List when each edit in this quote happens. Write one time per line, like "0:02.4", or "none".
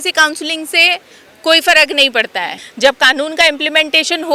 0:02.6

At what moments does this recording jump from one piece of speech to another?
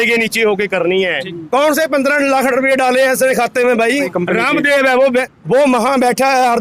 0:01.3
0:04.1
0:05.4

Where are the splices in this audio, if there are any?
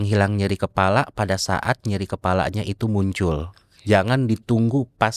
none

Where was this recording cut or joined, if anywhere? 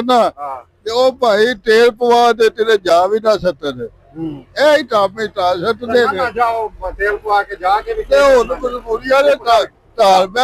none

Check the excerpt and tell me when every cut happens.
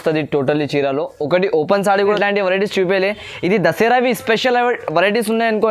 0:02.2

